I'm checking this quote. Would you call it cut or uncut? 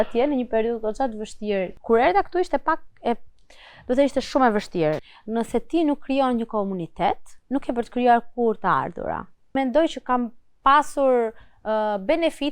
cut